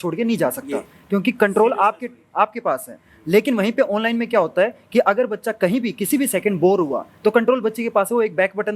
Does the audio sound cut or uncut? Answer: uncut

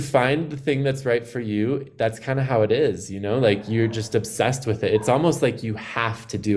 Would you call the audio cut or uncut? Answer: uncut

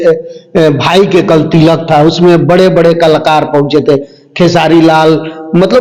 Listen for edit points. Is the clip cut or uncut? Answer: uncut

